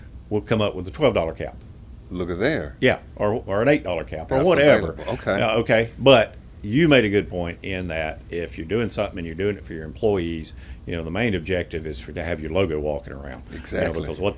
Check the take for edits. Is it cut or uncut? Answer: uncut